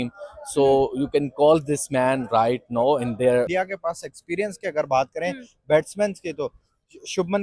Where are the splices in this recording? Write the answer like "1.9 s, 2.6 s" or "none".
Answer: 3.5 s